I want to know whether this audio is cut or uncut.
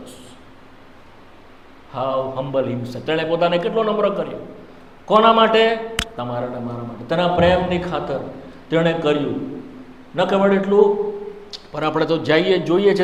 uncut